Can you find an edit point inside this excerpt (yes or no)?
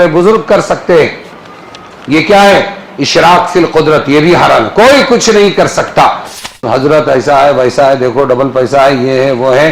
yes